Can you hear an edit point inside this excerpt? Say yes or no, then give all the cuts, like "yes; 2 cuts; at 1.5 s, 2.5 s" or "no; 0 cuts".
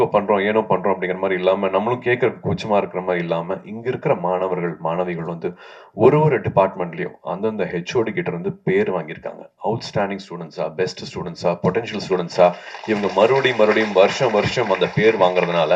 no; 0 cuts